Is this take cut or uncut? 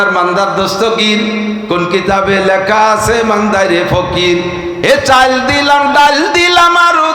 uncut